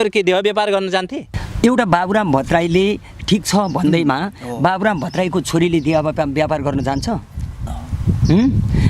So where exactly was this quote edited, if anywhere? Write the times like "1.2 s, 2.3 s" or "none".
1.2 s